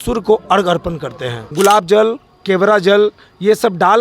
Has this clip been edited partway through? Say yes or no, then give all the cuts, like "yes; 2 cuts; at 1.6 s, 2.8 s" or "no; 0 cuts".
yes; 1 cut; at 1.4 s